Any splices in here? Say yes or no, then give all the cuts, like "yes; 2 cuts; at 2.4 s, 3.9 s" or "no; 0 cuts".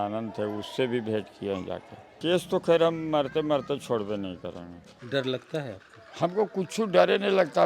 yes; 2 cuts; at 2.2 s, 4.9 s